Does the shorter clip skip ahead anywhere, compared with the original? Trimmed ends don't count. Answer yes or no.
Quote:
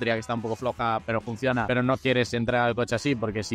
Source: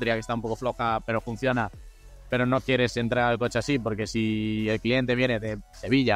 yes